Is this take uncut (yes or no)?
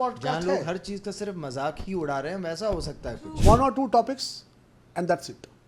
no